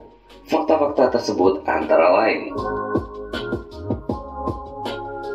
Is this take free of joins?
yes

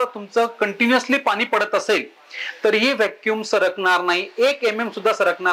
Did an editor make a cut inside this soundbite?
no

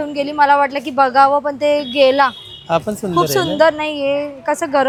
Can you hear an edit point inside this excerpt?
no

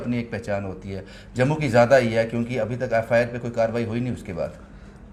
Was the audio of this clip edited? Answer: no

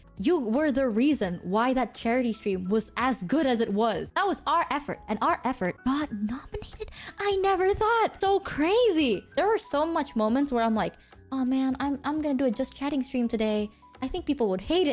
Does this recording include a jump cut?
yes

